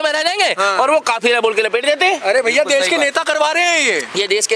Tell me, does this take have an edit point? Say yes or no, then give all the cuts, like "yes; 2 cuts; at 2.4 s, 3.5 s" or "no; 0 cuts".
no; 0 cuts